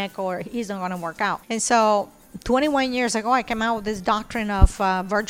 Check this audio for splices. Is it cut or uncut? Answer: cut